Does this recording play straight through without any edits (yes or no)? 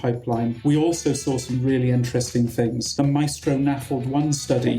no